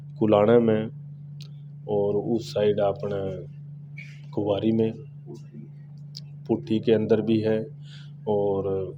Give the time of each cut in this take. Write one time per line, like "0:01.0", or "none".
none